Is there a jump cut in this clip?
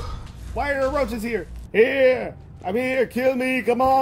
yes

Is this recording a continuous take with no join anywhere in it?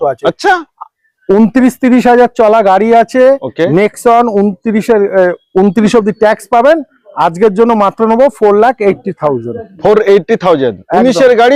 yes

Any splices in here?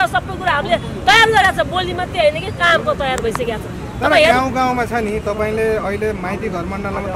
no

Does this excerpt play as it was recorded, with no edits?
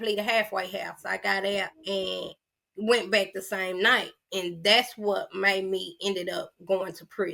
no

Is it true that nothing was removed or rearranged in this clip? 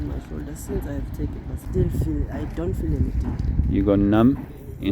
no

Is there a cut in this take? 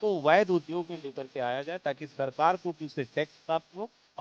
no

